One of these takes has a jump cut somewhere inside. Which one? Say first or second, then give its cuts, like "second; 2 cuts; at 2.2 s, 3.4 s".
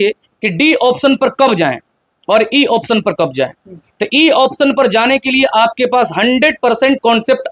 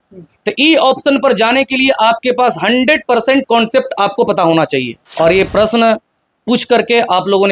second; 1 cut; at 5.0 s